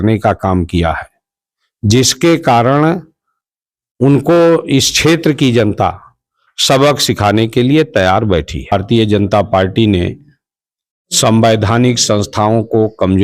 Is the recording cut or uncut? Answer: cut